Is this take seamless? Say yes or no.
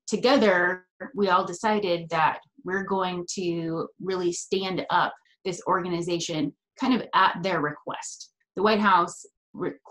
no